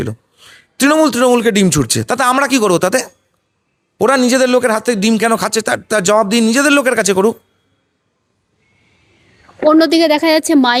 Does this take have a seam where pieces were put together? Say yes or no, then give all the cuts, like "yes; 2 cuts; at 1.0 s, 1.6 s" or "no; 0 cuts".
no; 0 cuts